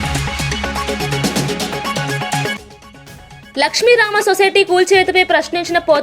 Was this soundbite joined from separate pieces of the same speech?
yes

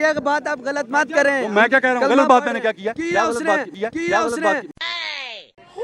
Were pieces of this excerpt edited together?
no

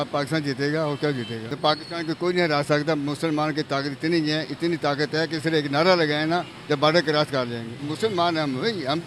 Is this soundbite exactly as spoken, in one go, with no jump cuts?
no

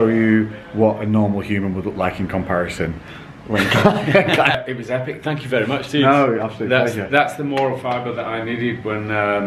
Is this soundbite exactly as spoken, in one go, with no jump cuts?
yes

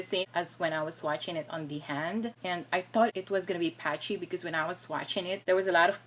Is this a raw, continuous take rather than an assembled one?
yes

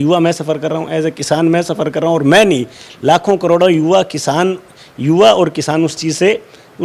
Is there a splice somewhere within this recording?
no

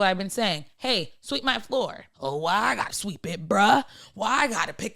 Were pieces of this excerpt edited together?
yes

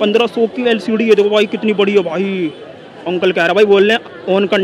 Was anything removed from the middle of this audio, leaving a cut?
no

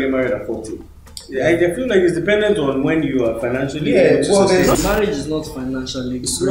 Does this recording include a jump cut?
yes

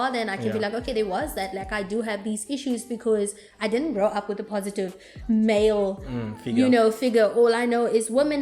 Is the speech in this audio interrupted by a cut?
no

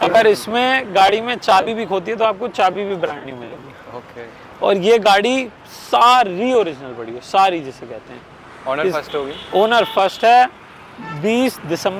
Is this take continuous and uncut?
yes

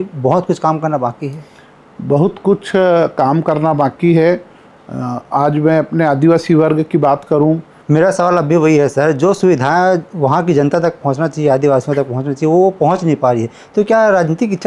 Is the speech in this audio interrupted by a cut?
yes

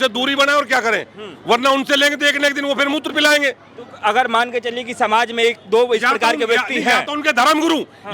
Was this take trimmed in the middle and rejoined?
no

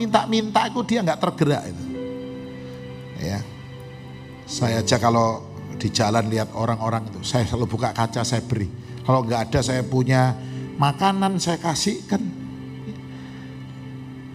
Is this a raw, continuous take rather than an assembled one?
yes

